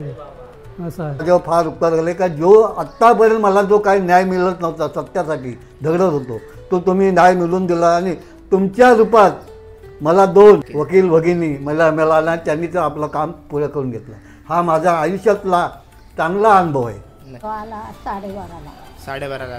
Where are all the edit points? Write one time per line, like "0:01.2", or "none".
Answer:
0:01.2
0:10.7
0:17.3